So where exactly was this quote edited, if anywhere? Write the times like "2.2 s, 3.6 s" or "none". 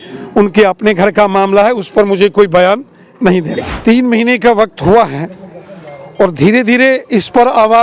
3.6 s